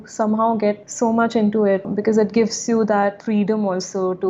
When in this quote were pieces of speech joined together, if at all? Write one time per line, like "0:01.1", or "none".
0:00.9
0:01.9